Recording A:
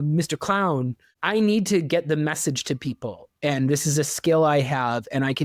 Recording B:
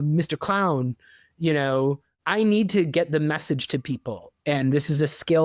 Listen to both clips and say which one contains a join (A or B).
A